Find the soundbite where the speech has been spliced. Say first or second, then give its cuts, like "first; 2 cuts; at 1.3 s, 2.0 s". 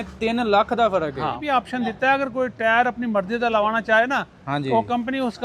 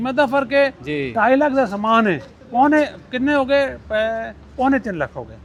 first; 1 cut; at 1.4 s